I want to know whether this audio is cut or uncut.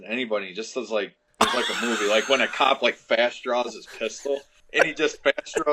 cut